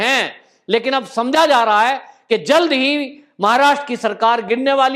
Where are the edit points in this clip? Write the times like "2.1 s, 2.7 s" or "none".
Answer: none